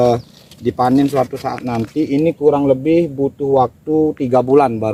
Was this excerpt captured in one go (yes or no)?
yes